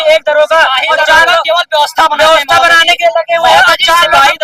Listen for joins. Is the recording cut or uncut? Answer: uncut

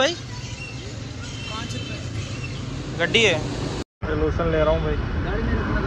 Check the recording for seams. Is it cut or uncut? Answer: uncut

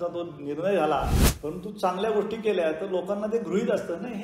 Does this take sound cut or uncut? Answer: cut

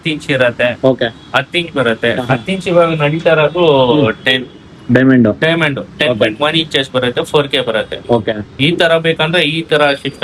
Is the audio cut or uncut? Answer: uncut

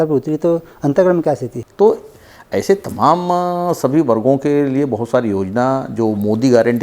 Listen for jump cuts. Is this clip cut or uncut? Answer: cut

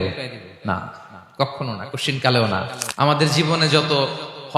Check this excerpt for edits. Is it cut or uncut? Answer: cut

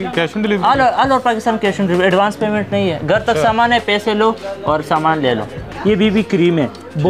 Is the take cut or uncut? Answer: cut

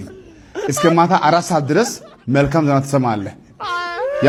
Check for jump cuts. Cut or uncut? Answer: uncut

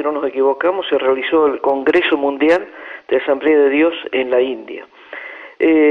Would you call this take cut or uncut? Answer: cut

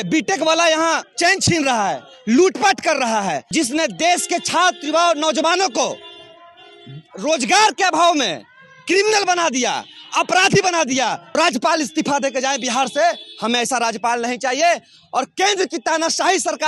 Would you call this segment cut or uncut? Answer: cut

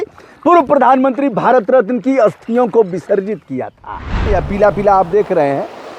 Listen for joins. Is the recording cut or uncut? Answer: cut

